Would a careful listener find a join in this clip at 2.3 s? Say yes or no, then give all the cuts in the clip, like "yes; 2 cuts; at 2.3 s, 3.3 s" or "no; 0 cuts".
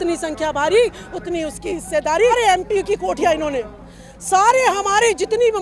yes; 1 cut; at 2.3 s